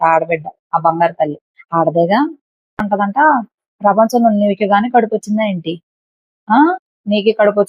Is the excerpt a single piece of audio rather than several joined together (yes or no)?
no